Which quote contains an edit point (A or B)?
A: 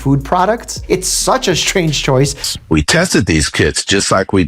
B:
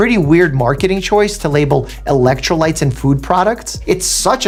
A